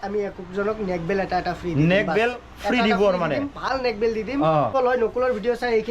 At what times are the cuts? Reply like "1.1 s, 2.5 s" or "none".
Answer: 4.7 s

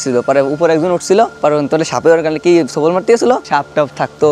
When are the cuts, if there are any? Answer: 3.4 s

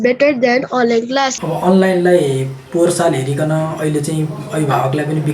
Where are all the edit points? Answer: 1.4 s

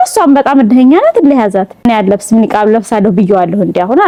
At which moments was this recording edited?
none

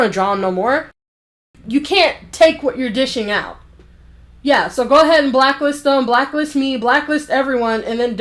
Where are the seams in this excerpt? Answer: 1.3 s

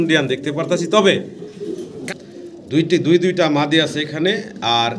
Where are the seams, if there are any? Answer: 2.1 s

